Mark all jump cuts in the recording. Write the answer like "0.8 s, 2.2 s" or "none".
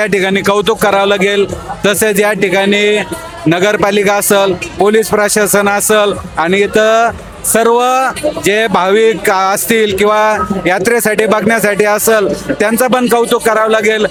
none